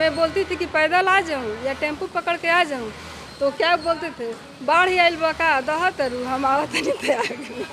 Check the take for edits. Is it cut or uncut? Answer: uncut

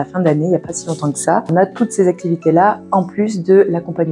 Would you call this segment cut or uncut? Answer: cut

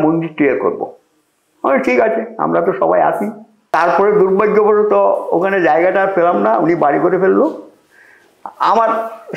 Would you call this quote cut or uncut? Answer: uncut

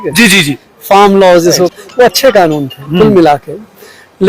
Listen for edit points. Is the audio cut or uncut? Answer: cut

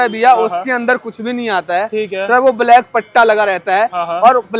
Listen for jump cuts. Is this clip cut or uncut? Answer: uncut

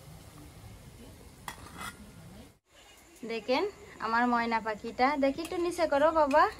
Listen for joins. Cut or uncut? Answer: cut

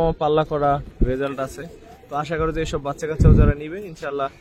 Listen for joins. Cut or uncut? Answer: uncut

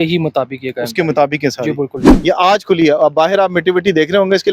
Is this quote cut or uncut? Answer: cut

